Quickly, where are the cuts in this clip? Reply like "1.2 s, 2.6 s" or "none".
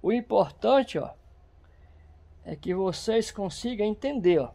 none